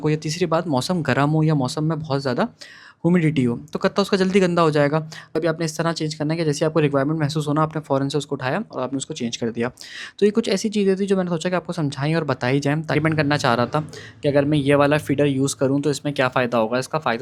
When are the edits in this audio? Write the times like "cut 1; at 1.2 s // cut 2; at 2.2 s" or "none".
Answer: cut 1; at 5.3 s // cut 2; at 12.9 s